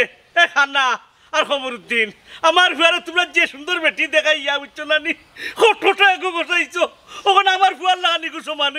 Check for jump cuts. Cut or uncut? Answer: uncut